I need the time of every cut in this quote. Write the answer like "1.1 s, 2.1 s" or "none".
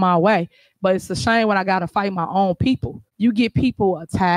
3.0 s